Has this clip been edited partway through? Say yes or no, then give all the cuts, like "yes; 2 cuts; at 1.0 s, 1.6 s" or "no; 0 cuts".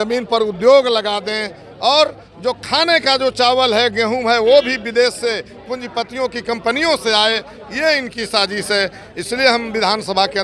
no; 0 cuts